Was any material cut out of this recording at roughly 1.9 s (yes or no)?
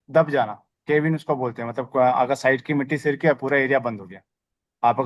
no